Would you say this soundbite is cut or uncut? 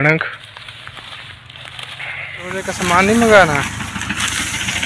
cut